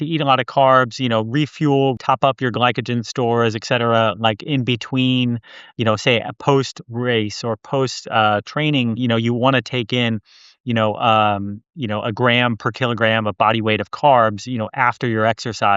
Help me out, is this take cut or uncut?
cut